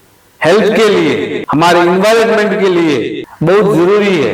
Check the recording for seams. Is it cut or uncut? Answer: cut